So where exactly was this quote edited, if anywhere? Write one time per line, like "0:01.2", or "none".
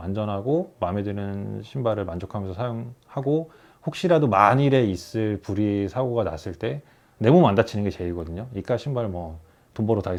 none